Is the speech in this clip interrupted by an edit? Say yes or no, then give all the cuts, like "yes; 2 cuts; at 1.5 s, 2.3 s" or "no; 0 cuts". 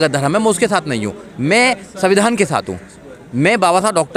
no; 0 cuts